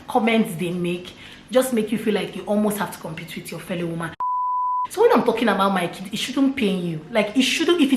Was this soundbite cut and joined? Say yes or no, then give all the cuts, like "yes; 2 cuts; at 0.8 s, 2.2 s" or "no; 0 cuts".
yes; 1 cut; at 4.3 s